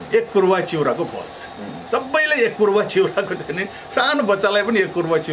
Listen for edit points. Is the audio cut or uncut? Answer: uncut